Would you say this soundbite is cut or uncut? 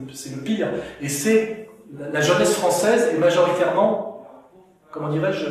uncut